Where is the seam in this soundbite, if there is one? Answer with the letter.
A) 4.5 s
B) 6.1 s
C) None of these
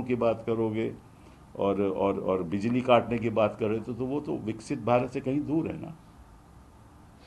C